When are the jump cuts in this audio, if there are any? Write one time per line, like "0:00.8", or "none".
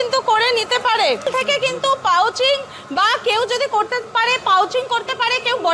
0:01.3

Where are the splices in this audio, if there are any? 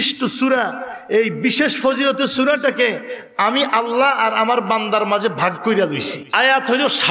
0:06.2

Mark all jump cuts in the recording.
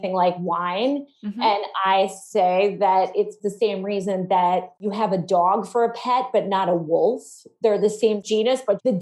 0:03.4
0:04.8

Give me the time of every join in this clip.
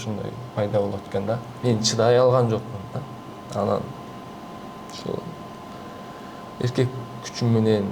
0:01.5

